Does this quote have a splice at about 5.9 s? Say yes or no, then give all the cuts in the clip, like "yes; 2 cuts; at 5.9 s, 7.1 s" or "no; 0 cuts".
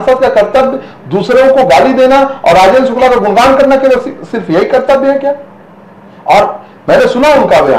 no; 0 cuts